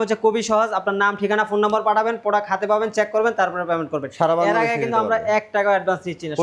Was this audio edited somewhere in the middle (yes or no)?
no